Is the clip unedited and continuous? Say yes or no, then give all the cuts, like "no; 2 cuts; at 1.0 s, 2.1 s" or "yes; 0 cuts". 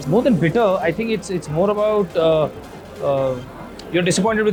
yes; 0 cuts